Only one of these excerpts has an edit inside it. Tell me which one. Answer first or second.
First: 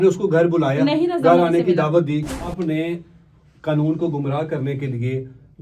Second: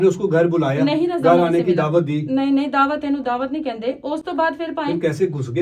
first